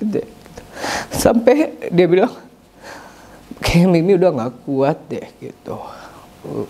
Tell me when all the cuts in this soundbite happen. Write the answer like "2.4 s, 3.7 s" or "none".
none